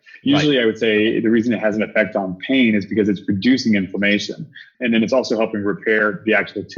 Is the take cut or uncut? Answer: cut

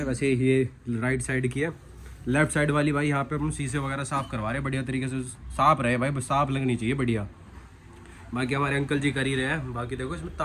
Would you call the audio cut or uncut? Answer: uncut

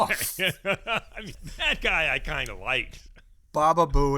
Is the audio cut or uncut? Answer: cut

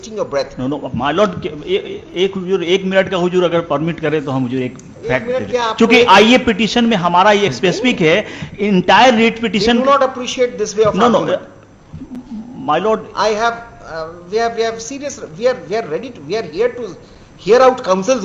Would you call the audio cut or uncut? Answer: uncut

